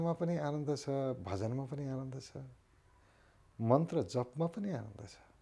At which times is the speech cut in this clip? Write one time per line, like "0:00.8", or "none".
none